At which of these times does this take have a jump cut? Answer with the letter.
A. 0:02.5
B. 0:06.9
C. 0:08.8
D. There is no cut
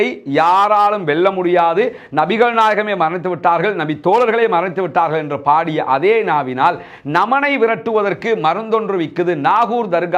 D